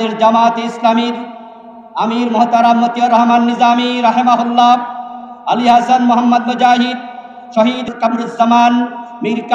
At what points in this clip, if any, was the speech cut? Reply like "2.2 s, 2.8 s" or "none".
7.9 s